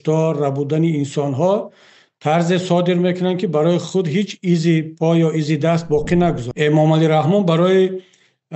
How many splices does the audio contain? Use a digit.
1